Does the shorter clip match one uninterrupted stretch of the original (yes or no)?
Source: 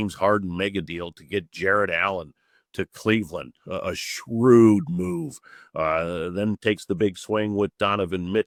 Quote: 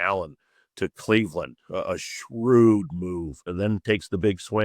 no